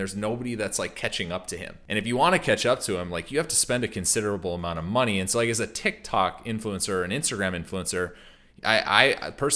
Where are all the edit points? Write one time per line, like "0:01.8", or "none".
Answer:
0:01.7